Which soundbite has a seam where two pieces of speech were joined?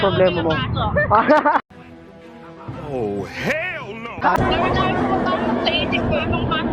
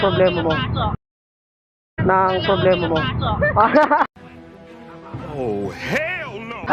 first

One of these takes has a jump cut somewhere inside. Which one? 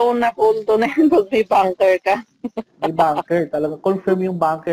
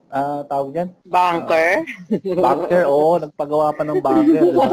second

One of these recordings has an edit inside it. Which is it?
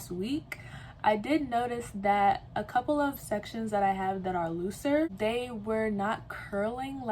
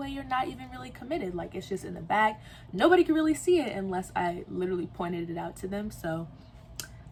first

